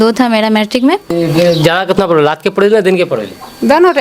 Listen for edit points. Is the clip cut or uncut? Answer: cut